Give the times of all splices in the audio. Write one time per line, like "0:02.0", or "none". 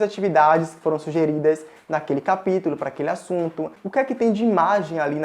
0:03.8